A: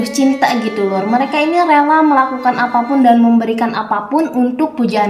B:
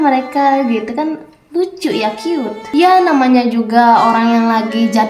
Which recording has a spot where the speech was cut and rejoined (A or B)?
B